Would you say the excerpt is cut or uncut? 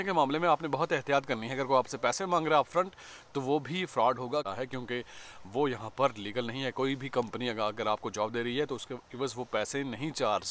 uncut